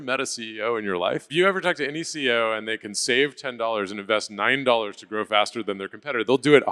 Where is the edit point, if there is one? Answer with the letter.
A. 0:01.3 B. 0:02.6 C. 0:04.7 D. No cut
A